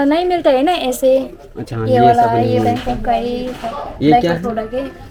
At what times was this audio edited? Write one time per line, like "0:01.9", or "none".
none